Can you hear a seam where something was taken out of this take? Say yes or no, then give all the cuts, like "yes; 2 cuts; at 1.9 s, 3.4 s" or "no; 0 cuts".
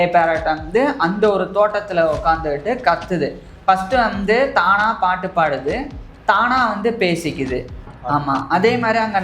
yes; 1 cut; at 7.8 s